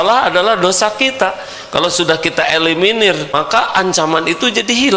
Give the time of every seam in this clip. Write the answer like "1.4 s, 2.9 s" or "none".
3.3 s